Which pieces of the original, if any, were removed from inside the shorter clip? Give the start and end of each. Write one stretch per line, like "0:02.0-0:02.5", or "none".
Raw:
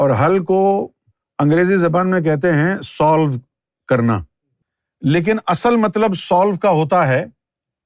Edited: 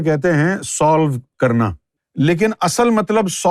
0:03.7-0:04.4